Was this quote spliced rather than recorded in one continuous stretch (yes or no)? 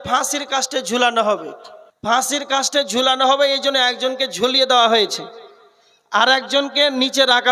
yes